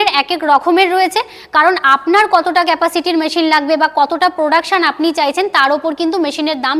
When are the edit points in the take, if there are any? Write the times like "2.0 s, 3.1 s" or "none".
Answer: none